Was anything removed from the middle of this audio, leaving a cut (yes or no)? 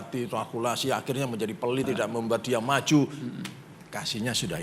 yes